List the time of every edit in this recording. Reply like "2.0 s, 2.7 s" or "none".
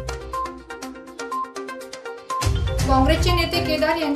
1.6 s